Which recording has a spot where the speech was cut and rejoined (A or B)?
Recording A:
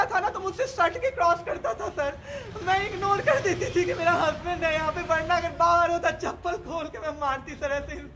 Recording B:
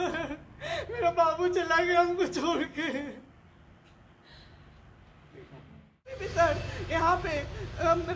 B